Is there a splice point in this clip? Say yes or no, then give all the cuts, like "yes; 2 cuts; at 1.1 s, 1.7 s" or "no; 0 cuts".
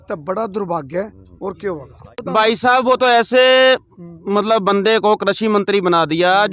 yes; 1 cut; at 2.2 s